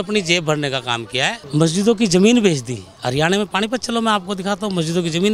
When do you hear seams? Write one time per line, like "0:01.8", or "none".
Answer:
0:01.4